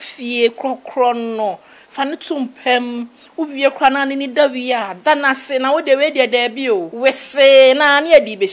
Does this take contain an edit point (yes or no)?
yes